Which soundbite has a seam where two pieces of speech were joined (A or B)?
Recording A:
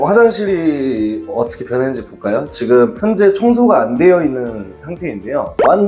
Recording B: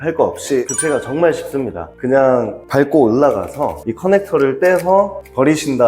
B